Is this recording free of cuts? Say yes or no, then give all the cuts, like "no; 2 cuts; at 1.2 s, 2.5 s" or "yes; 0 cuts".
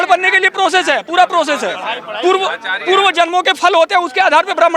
yes; 0 cuts